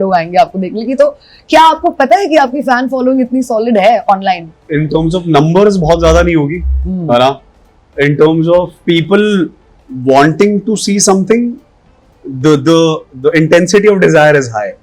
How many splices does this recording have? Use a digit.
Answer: 2